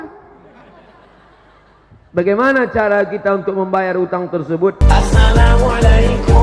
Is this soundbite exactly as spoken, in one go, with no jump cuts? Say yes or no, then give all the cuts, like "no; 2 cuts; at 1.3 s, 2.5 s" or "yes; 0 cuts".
no; 1 cut; at 4.8 s